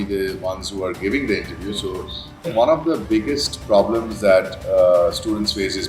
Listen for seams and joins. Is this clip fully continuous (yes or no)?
no